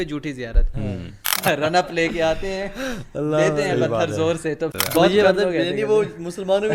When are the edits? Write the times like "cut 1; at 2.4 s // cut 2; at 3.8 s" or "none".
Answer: cut 1; at 1.2 s // cut 2; at 4.7 s